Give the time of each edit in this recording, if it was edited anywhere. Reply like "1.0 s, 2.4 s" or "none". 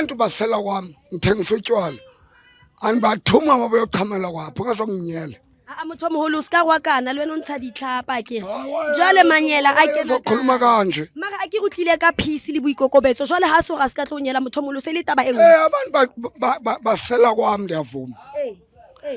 none